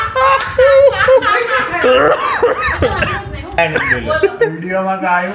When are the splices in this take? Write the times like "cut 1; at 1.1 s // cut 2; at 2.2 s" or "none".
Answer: cut 1; at 3.6 s